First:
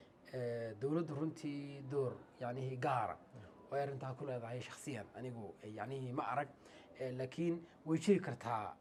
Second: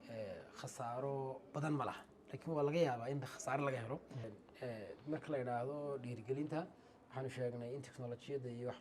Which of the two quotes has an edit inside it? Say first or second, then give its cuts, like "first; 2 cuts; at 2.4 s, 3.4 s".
second; 1 cut; at 4.3 s